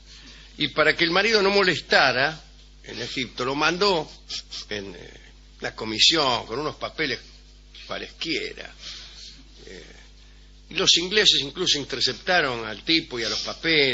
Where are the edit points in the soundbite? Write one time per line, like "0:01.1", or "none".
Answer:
0:06.2